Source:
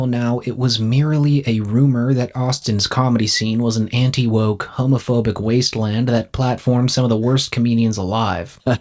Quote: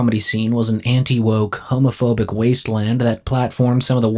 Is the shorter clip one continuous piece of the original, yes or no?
yes